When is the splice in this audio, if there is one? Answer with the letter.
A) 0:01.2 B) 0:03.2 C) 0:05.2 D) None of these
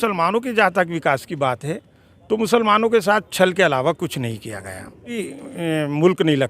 C